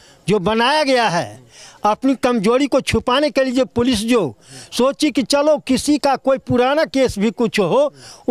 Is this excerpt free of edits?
yes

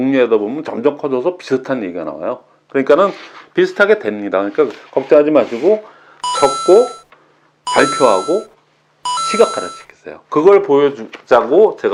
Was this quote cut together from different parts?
no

